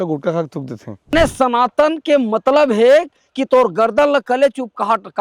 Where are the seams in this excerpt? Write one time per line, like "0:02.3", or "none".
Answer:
0:01.1